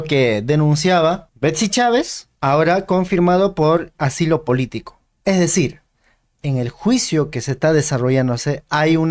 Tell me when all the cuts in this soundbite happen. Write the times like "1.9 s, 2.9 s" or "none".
1.3 s, 2.2 s